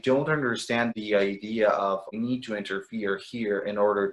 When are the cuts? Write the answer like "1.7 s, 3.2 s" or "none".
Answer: none